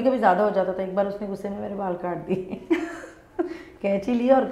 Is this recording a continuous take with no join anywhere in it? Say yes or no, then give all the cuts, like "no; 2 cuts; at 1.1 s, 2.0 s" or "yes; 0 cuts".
yes; 0 cuts